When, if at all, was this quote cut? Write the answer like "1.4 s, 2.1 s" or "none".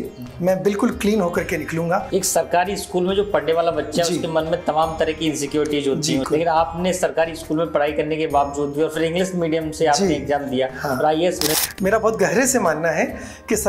2.1 s, 6.3 s, 11.5 s